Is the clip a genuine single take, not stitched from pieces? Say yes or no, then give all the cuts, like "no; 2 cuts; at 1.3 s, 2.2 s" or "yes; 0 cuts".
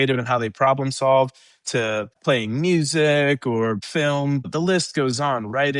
no; 2 cuts; at 2.2 s, 4.3 s